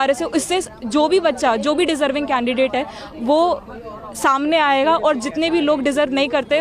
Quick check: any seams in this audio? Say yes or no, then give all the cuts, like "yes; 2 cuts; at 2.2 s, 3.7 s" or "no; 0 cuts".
no; 0 cuts